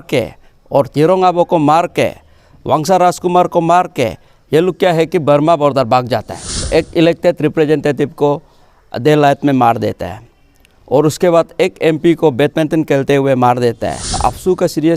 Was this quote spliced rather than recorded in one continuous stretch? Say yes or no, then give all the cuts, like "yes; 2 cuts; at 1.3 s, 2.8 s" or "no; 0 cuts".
yes; 2 cuts; at 6.7 s, 14.2 s